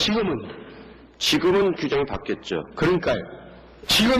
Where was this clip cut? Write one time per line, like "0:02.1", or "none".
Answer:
0:01.9